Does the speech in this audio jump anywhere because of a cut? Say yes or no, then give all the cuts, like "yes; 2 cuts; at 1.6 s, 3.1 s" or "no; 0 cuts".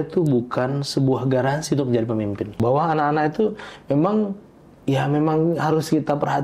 yes; 1 cut; at 2.5 s